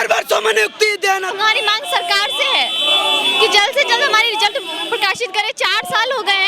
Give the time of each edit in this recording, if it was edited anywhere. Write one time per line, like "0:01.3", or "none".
0:01.3